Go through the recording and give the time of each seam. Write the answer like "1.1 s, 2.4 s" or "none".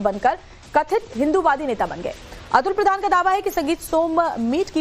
none